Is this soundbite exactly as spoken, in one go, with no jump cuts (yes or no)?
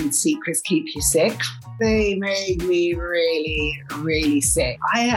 no